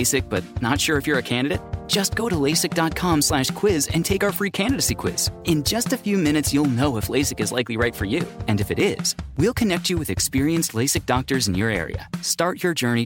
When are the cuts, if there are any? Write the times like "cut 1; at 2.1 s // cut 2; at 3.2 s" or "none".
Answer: none